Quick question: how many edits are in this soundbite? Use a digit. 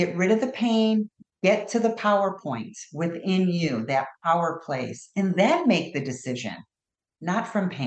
1